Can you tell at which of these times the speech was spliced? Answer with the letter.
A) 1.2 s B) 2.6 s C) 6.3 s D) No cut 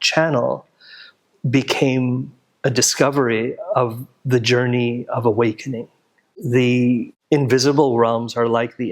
C